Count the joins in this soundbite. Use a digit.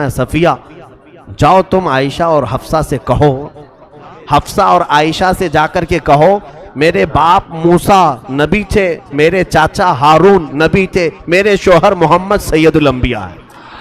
1